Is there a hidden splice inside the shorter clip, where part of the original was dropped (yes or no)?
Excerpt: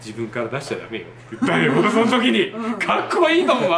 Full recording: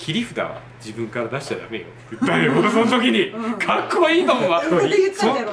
no